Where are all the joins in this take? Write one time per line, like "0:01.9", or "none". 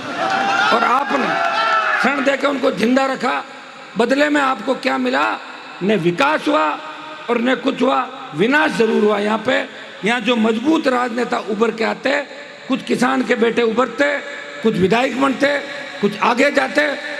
none